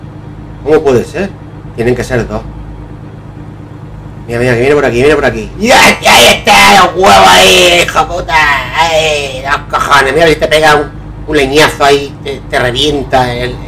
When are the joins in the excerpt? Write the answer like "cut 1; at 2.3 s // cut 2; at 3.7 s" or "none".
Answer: none